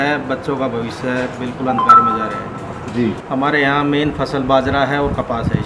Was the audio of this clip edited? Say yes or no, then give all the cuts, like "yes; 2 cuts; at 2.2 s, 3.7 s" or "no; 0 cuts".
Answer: yes; 1 cut; at 3.2 s